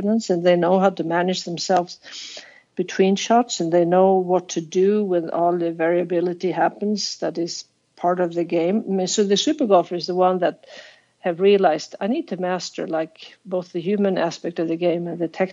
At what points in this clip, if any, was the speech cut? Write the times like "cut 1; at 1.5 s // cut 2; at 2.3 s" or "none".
none